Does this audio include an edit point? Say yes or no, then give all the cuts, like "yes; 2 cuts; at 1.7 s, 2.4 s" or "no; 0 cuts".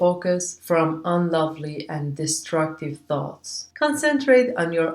no; 0 cuts